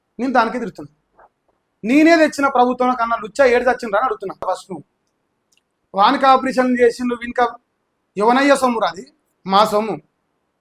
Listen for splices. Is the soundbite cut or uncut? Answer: cut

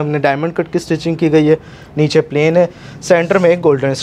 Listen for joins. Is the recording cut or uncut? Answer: uncut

